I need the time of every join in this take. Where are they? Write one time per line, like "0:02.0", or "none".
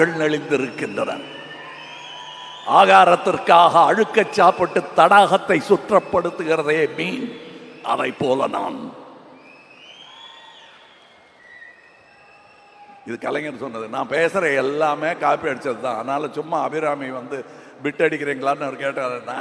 none